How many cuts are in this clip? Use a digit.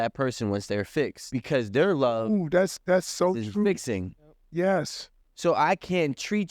1